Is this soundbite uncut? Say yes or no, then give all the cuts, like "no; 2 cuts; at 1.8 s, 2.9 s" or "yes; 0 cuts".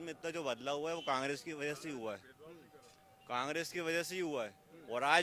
yes; 0 cuts